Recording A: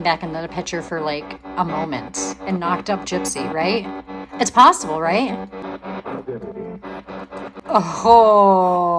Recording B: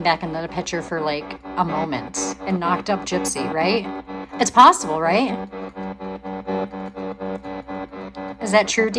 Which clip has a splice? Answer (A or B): A